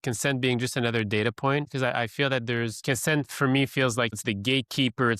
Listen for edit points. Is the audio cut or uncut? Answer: cut